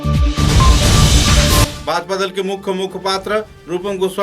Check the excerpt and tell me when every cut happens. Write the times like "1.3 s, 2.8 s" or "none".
1.7 s